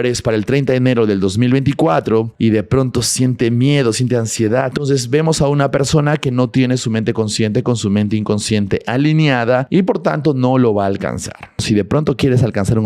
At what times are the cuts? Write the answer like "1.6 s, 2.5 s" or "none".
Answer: 2.3 s, 4.7 s, 9.7 s, 11.6 s